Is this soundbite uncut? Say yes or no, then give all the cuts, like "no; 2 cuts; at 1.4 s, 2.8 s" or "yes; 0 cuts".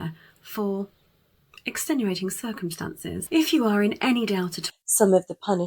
no; 1 cut; at 4.6 s